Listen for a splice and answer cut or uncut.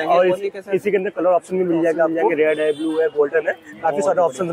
cut